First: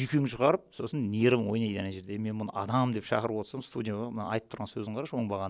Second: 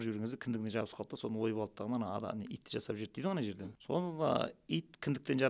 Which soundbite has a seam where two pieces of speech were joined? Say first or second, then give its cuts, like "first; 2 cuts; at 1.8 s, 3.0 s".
second; 1 cut; at 3.5 s